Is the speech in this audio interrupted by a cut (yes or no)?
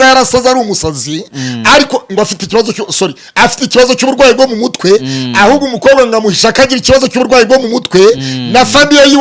no